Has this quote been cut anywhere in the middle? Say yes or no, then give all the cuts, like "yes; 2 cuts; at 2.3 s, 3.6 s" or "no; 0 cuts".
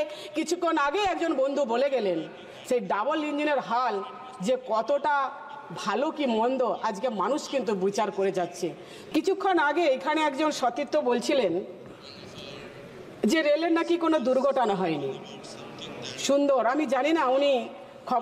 yes; 1 cut; at 8.9 s